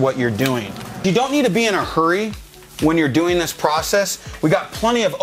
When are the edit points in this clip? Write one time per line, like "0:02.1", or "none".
0:01.0

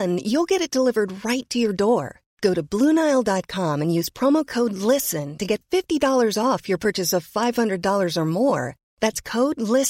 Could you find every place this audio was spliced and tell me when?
none

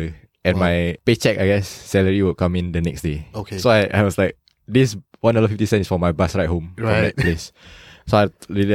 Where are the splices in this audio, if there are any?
0:01.0

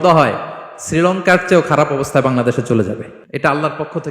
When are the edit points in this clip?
0:03.2

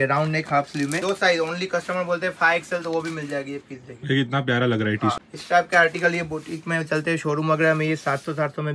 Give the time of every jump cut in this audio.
0:01.0
0:05.2

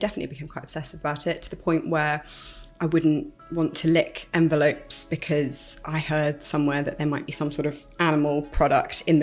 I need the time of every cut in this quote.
none

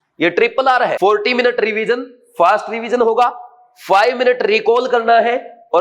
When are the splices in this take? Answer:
0:01.0

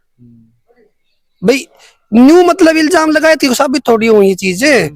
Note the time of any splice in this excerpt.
none

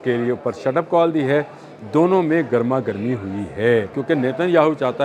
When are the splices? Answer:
0:04.0

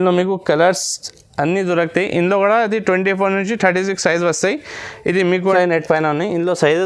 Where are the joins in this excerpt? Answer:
0:05.5

